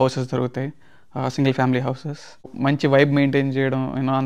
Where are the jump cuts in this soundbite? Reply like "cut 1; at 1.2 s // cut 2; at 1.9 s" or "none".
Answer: cut 1; at 2.5 s